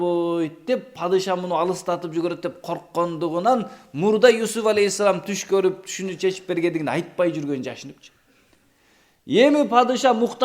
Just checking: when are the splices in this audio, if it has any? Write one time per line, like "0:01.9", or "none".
none